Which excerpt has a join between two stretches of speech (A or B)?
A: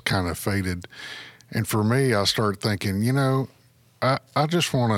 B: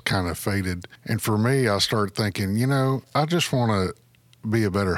B